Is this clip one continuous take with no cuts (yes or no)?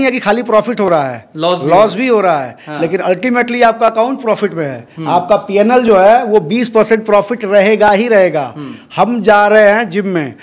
yes